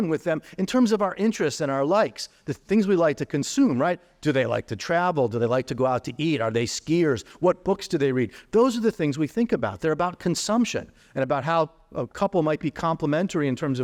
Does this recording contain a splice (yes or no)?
no